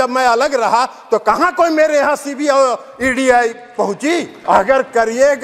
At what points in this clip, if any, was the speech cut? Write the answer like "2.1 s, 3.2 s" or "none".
4.3 s